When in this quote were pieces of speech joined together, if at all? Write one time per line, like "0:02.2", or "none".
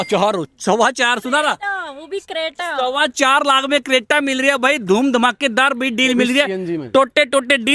none